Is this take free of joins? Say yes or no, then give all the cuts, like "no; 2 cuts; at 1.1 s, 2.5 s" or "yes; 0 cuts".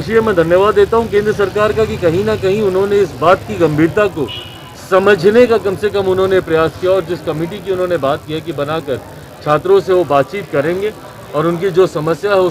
no; 1 cut; at 3.9 s